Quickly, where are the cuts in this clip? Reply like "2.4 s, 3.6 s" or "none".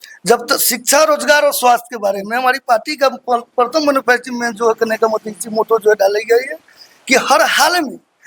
none